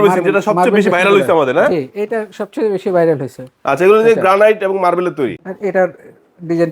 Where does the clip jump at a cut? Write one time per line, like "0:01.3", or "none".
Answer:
0:05.4